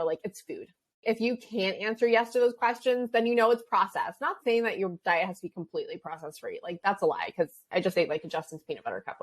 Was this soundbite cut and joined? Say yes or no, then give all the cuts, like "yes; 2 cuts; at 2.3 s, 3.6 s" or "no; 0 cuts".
yes; 2 cuts; at 1.0 s, 7.6 s